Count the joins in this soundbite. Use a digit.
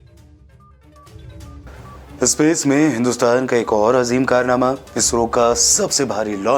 1